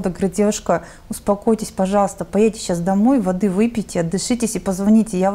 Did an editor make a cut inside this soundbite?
no; 0 cuts

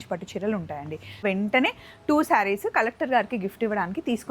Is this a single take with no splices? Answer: no; 1 cut; at 1.2 s

